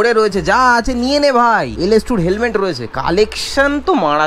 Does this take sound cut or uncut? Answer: cut